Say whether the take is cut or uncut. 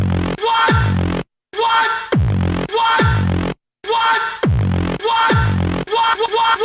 cut